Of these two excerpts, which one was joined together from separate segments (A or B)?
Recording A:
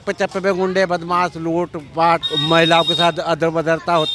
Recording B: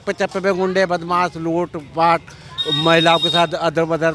A